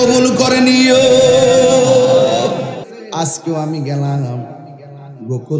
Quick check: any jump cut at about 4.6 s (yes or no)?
no